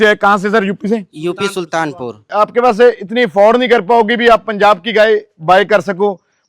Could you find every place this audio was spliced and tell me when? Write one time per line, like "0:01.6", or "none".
0:02.2